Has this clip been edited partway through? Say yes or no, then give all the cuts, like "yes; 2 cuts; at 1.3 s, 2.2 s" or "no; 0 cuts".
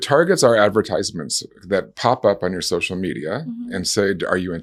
no; 0 cuts